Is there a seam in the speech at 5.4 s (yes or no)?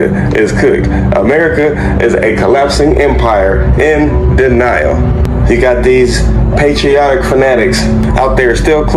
no